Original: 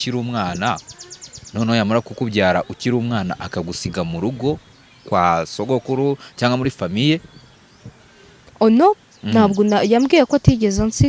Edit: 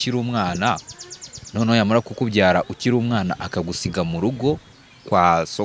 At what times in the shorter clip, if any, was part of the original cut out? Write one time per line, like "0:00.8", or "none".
none